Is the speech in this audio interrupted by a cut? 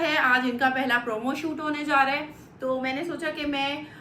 no; 0 cuts

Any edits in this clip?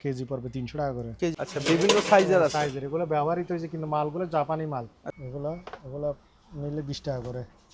yes; 2 cuts; at 1.3 s, 5.0 s

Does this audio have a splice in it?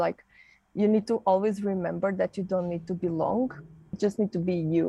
yes; 1 cut; at 3.9 s

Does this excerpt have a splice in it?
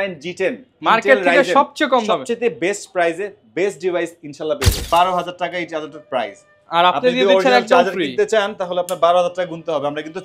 yes; 1 cut; at 4.8 s

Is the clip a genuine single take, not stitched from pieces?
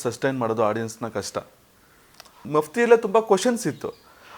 no; 1 cut; at 2.4 s

